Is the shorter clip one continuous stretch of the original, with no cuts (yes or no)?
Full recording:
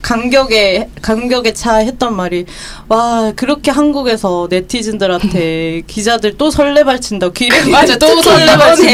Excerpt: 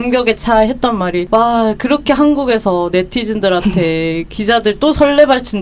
no